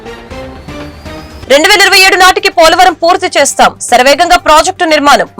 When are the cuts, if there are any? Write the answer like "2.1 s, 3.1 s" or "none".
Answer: 1.3 s